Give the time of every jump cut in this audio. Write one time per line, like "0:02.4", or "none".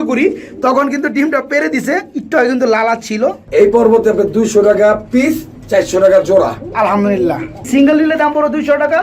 0:03.5
0:07.5